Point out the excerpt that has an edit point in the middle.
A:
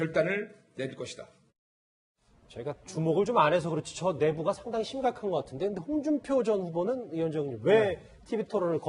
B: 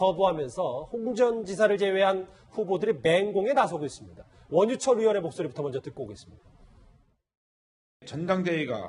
A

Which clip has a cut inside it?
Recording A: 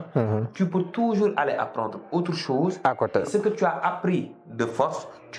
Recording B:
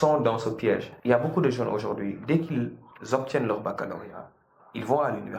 B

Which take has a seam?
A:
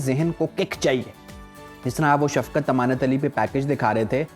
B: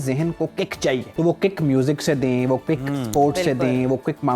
B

